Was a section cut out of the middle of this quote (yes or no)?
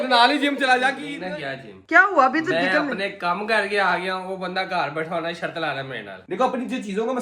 yes